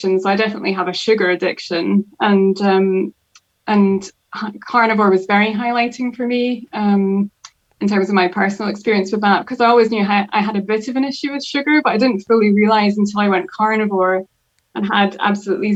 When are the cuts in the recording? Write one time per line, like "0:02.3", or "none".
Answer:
none